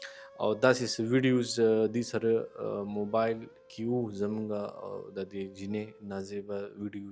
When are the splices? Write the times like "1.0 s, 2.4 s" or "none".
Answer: none